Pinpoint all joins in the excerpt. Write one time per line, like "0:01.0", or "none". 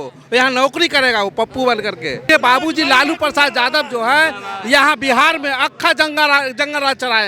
0:02.2